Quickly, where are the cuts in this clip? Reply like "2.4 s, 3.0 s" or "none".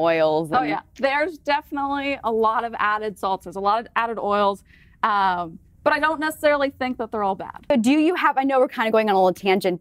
none